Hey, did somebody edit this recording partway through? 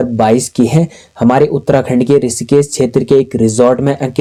no; 0 cuts

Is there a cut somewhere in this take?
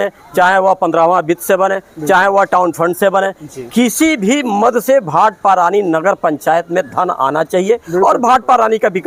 no; 0 cuts

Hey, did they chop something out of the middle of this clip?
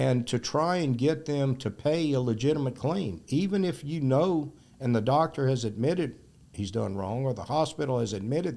no; 0 cuts

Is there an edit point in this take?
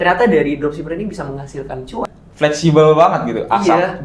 yes; 1 cut; at 2.2 s

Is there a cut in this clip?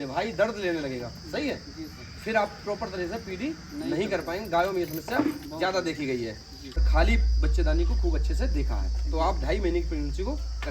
yes; 1 cut; at 6.7 s

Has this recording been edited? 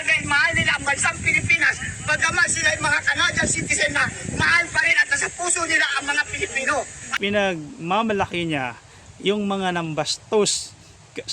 yes; 1 cut; at 7.0 s

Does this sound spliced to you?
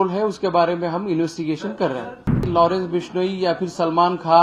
yes; 1 cut; at 2.4 s

